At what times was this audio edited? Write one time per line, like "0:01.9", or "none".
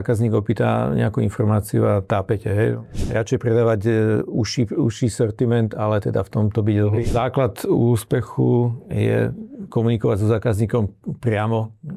0:02.9
0:07.1